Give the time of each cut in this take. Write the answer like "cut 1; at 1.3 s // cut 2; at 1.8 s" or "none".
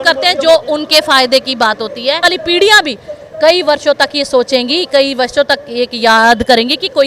cut 1; at 2.2 s